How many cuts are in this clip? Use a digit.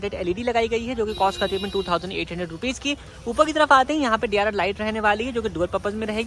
0